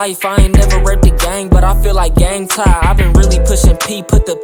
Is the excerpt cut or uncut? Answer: uncut